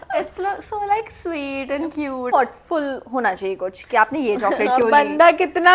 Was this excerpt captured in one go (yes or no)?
no